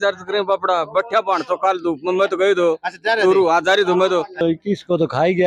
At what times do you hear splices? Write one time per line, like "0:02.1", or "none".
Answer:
0:04.4